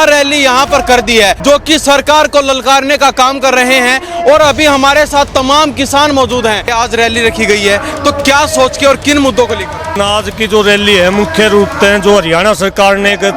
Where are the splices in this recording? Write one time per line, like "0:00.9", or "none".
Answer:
0:01.4
0:06.7
0:09.9